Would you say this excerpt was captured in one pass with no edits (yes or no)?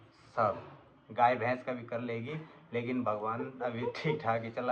yes